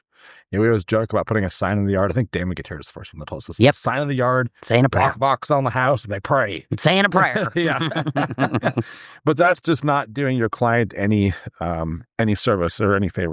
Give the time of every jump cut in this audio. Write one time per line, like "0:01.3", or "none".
0:09.6